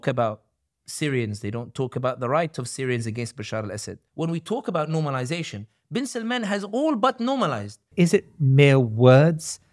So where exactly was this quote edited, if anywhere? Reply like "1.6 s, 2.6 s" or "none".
4.0 s, 7.9 s

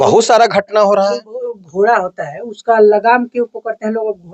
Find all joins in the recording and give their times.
1.6 s

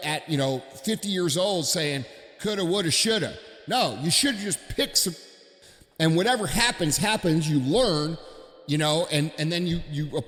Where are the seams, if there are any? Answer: none

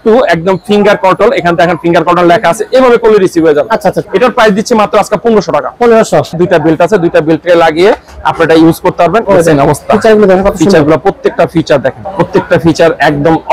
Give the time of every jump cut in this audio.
4.0 s, 6.4 s, 9.2 s, 12.0 s

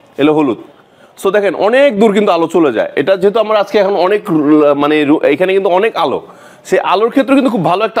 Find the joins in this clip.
none

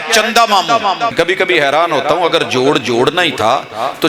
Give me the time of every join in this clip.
1.1 s

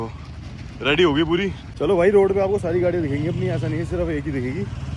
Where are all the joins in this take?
1.6 s

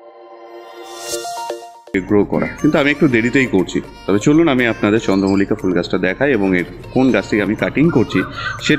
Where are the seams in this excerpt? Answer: 1.9 s

